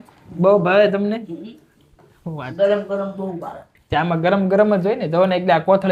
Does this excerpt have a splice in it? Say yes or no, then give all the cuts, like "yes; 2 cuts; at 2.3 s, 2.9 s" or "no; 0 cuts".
no; 0 cuts